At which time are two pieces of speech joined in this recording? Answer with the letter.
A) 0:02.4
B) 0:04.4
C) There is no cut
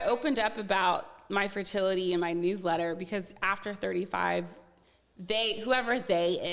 C